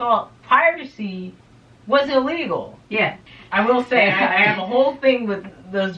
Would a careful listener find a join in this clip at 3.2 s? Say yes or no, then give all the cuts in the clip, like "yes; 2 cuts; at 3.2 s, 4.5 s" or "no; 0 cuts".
yes; 1 cut; at 3.2 s